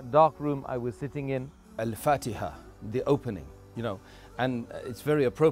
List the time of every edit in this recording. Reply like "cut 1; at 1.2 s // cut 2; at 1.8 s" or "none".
cut 1; at 1.7 s